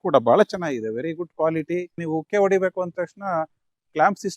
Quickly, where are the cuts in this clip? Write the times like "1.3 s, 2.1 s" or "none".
1.9 s